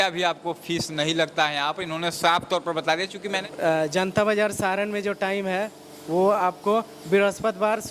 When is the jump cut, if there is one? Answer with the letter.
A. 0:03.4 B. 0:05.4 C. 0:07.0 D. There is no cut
A